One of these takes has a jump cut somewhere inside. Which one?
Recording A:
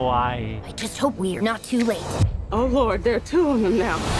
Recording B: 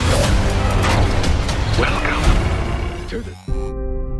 B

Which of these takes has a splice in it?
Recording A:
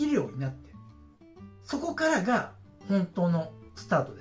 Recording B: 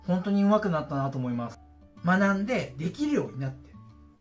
B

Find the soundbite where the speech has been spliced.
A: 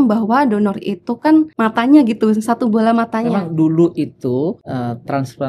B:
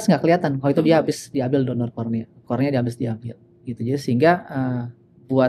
A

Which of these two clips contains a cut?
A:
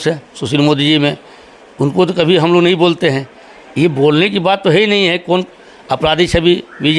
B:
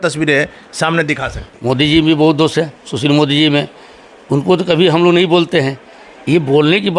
B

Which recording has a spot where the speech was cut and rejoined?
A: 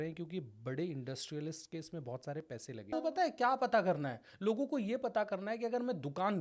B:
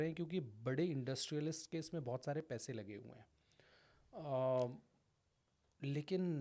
A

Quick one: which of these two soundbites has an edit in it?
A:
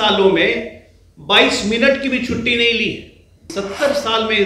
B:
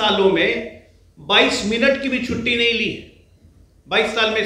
A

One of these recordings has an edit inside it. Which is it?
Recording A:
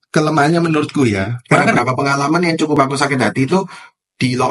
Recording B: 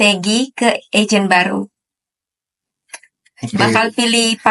A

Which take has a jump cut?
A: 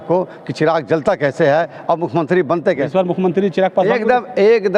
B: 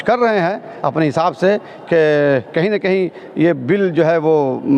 A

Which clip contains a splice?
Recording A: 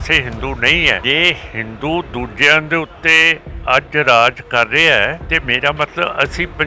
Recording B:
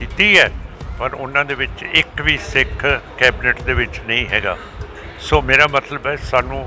A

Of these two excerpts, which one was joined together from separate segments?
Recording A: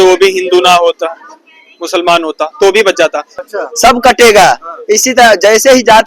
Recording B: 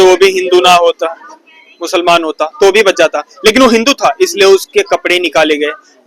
A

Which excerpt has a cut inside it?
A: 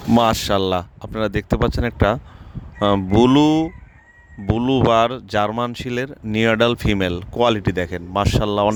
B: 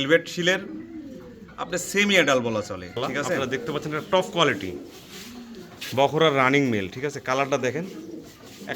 B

